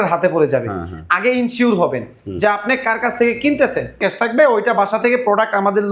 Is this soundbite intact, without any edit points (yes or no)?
no